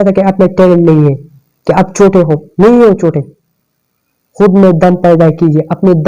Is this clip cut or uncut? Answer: uncut